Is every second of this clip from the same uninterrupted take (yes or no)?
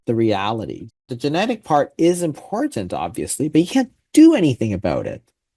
no